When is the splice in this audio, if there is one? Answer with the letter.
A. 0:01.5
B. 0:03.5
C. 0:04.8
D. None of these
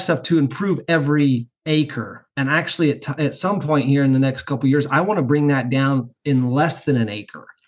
A